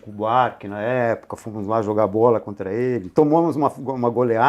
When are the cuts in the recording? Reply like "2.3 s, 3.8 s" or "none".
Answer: none